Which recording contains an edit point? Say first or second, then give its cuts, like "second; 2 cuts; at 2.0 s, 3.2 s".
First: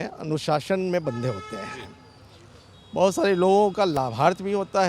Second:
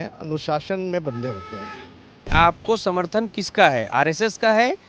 second; 1 cut; at 2.2 s